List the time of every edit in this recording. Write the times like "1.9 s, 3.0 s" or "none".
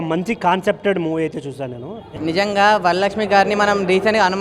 2.1 s

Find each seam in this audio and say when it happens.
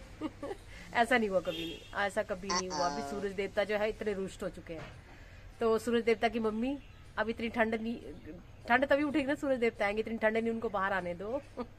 none

